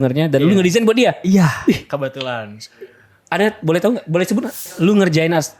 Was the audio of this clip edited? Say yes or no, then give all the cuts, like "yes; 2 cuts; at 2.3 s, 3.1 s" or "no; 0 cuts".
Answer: yes; 1 cut; at 4.6 s